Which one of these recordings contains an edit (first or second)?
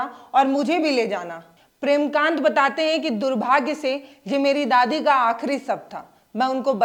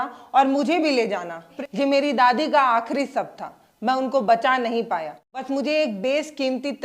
second